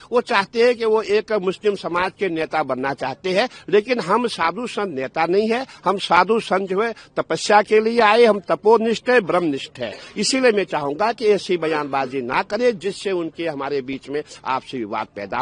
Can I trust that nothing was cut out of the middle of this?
yes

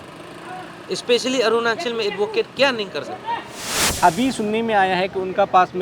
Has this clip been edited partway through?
yes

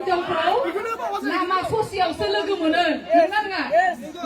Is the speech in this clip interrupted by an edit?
no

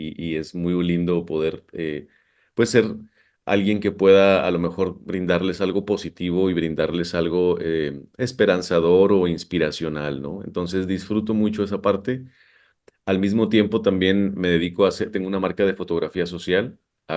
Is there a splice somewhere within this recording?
no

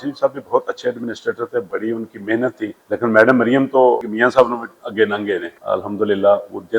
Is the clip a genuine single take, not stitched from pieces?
no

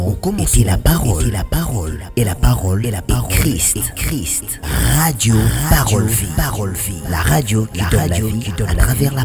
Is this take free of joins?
yes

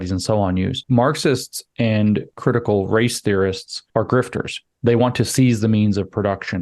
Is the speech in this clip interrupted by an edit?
yes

